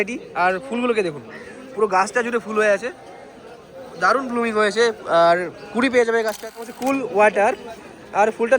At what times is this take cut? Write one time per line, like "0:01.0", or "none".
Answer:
0:06.5